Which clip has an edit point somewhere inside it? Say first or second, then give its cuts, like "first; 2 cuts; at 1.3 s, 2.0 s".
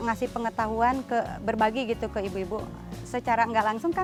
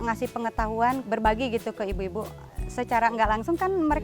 second; 1 cut; at 1.0 s